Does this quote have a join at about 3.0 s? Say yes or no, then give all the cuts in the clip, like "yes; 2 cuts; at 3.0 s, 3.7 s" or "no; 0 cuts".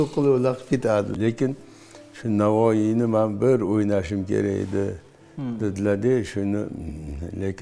no; 1 cut; at 1.1 s